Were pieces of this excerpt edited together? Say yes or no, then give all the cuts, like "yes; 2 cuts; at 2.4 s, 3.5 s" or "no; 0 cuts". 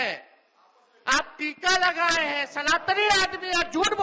no; 0 cuts